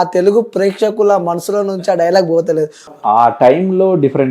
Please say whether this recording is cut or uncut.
cut